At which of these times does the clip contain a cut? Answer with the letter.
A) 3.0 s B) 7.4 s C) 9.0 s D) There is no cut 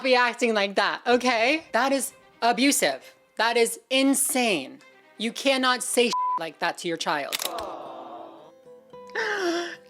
B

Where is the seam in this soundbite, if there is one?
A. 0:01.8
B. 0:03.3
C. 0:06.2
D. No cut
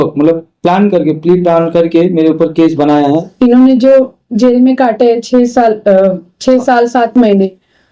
B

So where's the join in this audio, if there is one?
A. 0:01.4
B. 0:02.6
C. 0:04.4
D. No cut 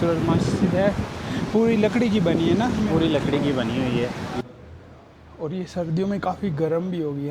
C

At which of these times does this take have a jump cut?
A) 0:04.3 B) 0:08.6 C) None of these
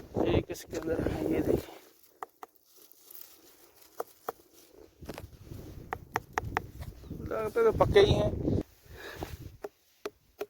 B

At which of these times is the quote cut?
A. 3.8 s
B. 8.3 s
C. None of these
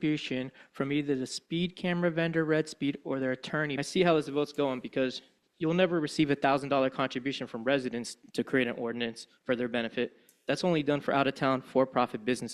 A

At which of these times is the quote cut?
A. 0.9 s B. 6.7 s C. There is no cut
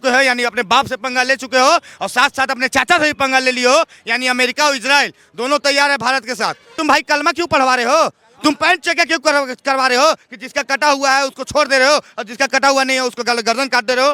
B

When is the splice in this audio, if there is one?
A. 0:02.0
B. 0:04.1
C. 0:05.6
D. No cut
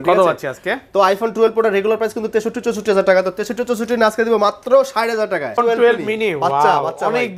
C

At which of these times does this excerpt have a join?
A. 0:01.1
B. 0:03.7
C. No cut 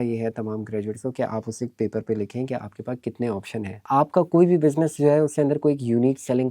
B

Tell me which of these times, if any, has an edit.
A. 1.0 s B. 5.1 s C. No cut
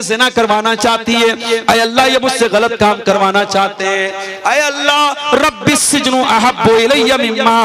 C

